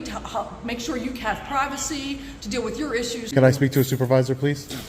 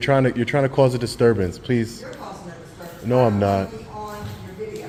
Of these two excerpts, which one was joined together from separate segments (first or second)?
first